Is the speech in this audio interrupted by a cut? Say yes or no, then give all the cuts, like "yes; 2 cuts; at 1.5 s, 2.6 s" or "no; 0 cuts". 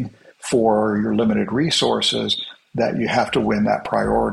no; 0 cuts